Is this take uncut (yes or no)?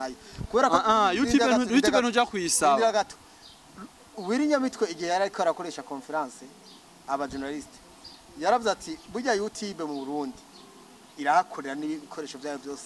yes